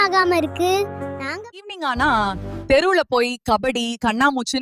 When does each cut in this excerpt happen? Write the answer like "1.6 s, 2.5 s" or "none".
1.6 s